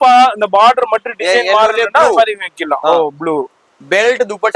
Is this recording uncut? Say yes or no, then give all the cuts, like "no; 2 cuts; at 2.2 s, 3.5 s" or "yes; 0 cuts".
no; 1 cut; at 3.6 s